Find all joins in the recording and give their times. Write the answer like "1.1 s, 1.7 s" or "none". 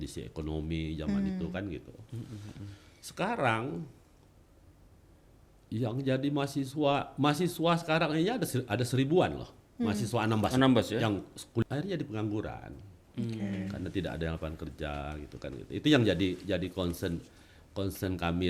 11.6 s